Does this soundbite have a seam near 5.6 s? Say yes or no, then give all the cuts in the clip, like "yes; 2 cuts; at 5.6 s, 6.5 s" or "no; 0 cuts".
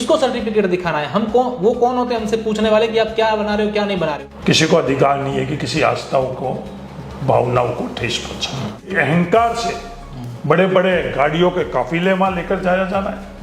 no; 2 cuts; at 4.3 s, 8.9 s